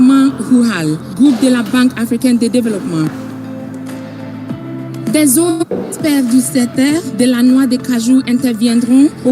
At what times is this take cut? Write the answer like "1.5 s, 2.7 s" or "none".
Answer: 1.4 s